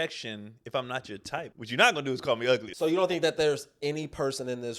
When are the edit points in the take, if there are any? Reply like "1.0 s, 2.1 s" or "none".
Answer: 1.5 s, 2.7 s